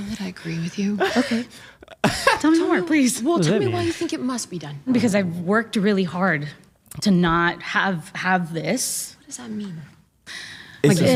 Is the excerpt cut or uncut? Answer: uncut